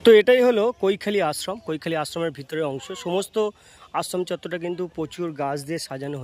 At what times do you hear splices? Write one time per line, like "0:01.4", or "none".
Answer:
none